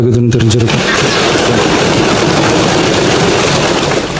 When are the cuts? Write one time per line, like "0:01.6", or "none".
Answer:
none